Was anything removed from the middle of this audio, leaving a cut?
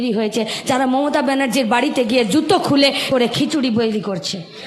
yes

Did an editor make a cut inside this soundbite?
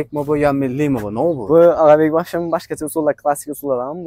no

